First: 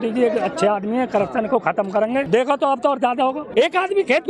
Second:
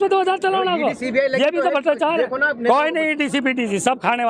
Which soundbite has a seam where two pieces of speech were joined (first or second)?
first